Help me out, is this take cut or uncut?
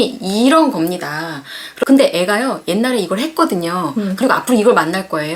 uncut